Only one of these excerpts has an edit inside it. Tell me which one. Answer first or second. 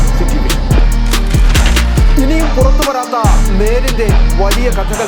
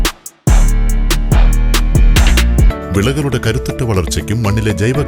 second